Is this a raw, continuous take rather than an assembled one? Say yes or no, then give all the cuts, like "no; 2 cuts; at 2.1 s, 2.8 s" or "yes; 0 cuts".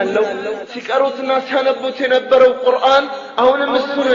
yes; 0 cuts